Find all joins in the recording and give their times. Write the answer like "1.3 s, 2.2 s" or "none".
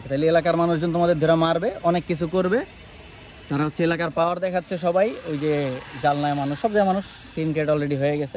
none